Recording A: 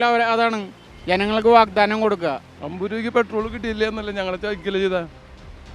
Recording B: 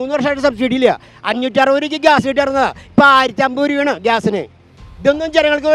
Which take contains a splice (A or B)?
A